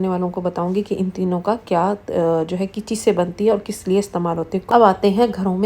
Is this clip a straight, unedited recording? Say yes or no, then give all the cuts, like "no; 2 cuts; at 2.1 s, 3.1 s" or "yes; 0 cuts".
no; 1 cut; at 4.6 s